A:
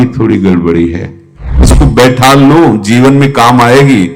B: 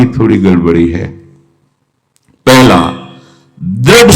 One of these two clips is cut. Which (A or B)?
A